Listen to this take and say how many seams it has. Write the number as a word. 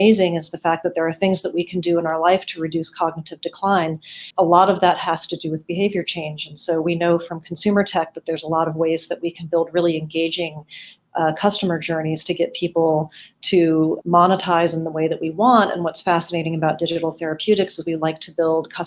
two